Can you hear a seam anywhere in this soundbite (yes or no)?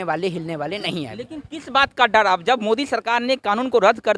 no